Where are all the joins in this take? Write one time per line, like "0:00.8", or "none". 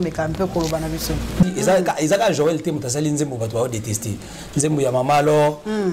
0:01.4